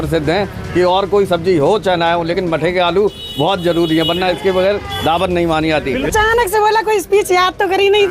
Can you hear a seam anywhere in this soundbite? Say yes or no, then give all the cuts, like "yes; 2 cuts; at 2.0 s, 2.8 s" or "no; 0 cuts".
yes; 1 cut; at 6.1 s